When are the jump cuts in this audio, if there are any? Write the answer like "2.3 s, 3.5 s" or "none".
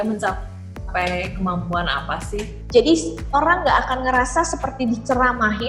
2.6 s

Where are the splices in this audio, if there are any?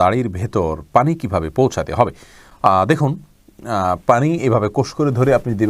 none

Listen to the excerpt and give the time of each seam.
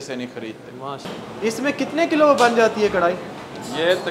1.0 s

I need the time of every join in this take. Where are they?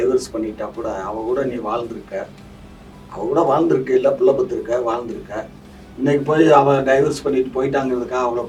none

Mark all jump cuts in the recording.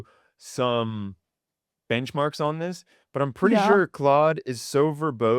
none

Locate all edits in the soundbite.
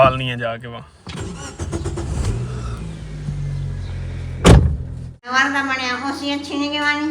5.3 s

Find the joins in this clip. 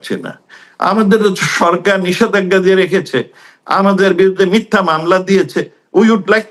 none

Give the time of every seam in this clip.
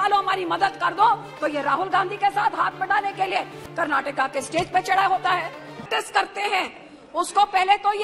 5.9 s

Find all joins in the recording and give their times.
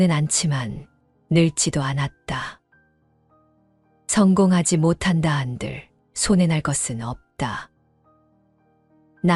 none

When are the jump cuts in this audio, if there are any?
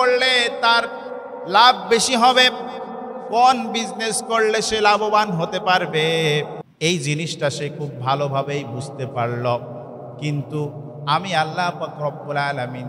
6.6 s

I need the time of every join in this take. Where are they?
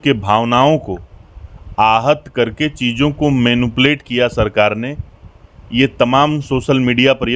none

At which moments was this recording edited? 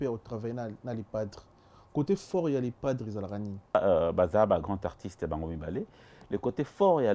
3.7 s

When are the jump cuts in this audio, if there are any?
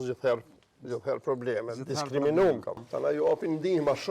2.8 s

